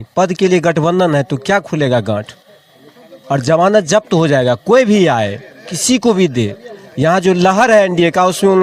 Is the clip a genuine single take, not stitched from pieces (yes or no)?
yes